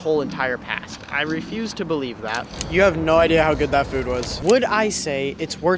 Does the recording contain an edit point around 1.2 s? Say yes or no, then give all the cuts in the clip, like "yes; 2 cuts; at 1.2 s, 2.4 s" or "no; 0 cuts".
no; 2 cuts; at 2.5 s, 4.4 s